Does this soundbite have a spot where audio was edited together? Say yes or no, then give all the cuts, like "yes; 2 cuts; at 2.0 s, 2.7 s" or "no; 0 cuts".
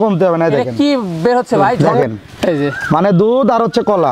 yes; 1 cut; at 1.9 s